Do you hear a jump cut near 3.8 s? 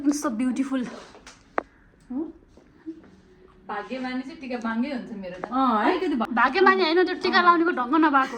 no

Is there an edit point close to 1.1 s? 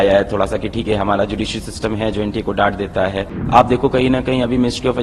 no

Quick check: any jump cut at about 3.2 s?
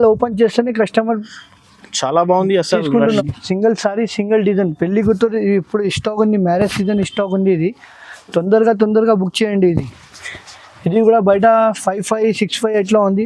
yes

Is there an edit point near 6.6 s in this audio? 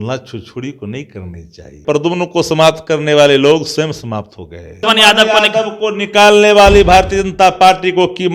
no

